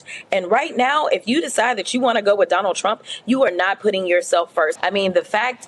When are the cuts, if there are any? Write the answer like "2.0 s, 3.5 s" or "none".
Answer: 4.8 s